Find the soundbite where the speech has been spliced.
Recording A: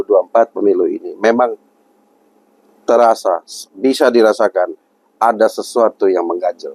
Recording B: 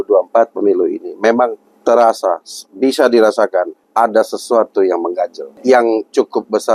B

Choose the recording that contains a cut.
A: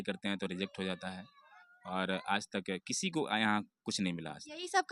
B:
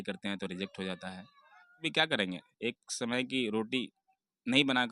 B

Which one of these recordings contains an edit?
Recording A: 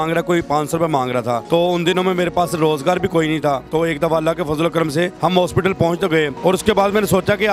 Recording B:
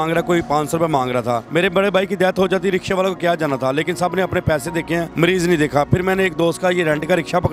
B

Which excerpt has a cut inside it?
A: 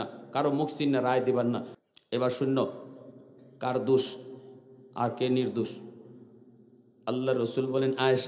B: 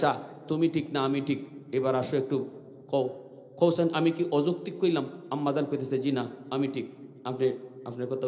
A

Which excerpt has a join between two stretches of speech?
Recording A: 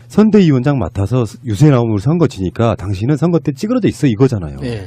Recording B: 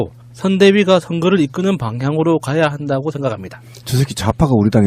B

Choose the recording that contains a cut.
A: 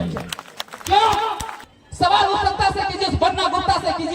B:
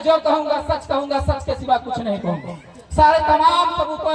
A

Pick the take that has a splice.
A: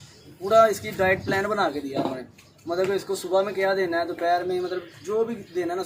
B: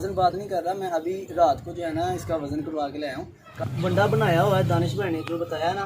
B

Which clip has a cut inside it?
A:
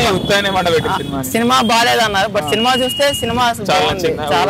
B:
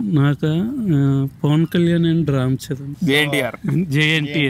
B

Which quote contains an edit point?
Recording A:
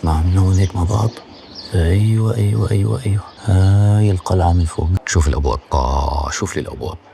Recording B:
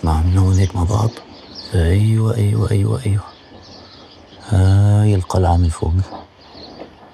A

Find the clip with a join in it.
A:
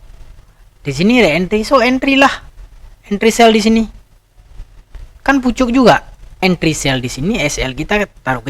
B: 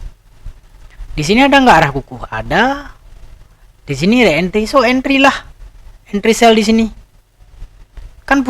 A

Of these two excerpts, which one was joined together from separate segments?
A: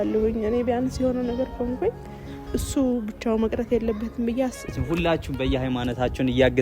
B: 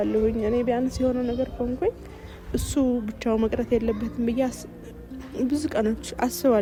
A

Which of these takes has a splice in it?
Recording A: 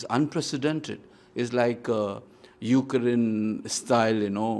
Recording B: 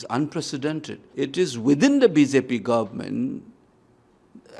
B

